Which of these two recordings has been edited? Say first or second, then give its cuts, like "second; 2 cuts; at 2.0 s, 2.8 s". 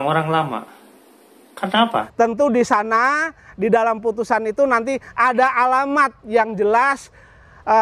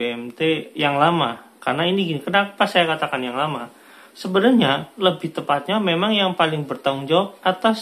first; 1 cut; at 2.1 s